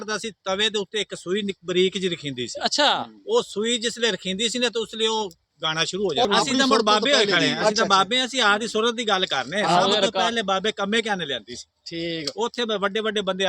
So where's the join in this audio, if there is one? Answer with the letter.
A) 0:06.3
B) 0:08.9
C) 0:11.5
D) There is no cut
A